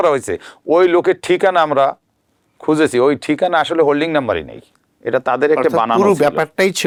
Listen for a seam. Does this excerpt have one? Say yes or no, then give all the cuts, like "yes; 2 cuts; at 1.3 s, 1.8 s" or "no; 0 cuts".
no; 0 cuts